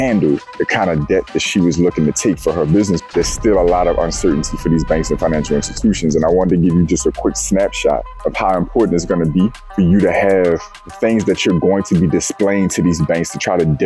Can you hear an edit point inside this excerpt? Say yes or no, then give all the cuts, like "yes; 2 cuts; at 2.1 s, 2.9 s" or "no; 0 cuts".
yes; 1 cut; at 3.0 s